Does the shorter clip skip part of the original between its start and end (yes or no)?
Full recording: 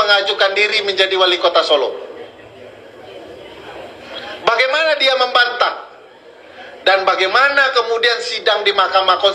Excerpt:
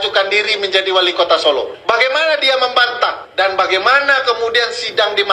yes